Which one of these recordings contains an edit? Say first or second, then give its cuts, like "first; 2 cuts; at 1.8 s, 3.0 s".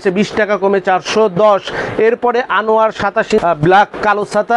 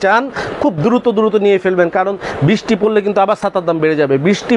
first; 1 cut; at 3.4 s